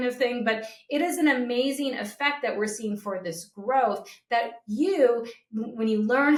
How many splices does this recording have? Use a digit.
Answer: 0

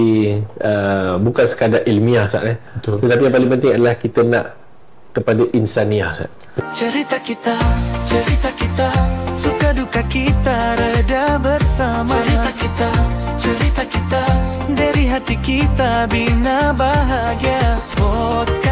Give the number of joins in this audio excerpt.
2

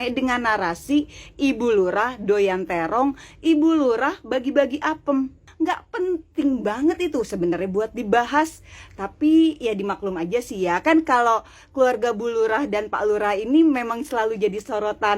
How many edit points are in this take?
1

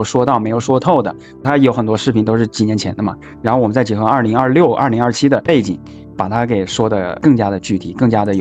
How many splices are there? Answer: 3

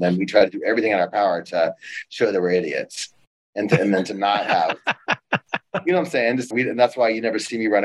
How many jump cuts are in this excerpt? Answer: 1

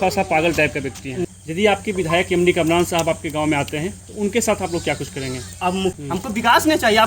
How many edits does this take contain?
2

